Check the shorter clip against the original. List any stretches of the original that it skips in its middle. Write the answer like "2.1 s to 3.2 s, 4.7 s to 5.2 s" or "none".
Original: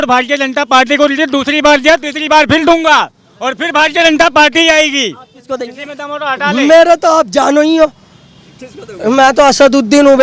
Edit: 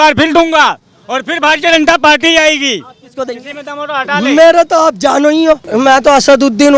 8.0 s to 9.0 s